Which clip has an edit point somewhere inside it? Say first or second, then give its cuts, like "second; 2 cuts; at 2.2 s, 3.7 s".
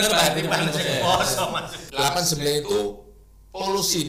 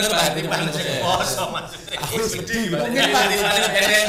first; 1 cut; at 1.8 s